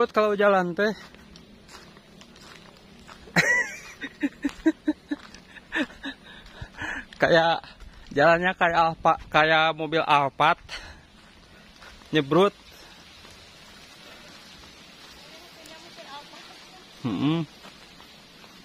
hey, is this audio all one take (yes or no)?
yes